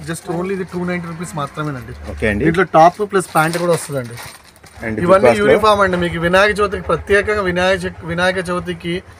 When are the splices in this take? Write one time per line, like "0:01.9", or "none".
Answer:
0:04.7